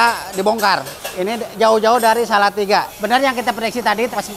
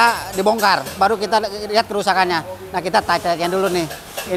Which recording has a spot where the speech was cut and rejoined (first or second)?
first